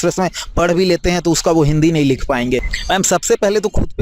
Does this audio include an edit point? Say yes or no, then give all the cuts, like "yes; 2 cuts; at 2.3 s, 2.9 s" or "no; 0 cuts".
yes; 1 cut; at 2.7 s